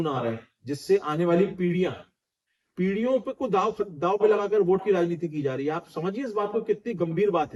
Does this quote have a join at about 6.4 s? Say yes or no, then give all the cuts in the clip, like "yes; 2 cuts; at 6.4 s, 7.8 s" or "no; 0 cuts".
no; 0 cuts